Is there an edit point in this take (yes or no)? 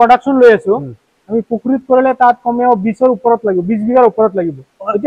no